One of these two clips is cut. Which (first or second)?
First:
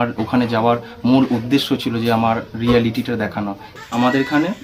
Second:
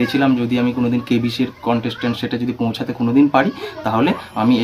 first